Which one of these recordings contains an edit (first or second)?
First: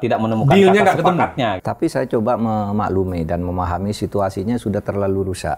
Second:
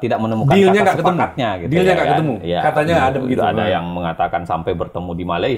first